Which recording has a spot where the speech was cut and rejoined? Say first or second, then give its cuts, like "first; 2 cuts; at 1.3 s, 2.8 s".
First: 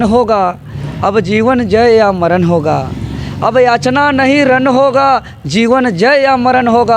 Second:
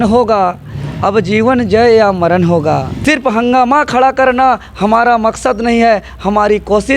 second; 1 cut; at 3.0 s